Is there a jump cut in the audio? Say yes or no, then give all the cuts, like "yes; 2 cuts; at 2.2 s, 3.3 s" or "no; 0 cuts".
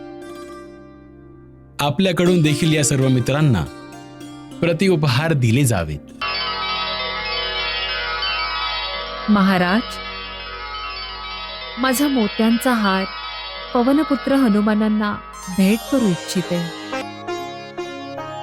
yes; 2 cuts; at 6.2 s, 17.0 s